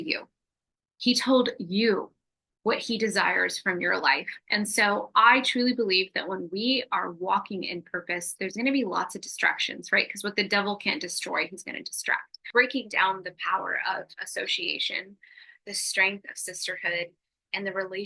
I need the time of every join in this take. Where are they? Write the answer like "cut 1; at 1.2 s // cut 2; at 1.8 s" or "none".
cut 1; at 12.3 s